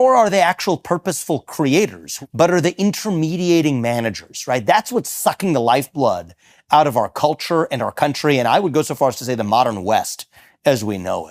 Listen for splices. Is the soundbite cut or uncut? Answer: cut